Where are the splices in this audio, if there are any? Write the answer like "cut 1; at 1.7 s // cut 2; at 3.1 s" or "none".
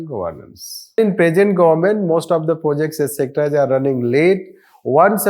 cut 1; at 1.0 s